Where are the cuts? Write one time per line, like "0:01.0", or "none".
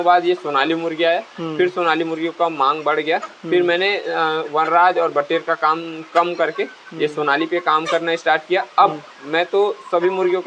none